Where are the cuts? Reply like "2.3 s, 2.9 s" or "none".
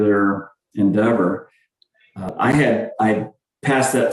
2.5 s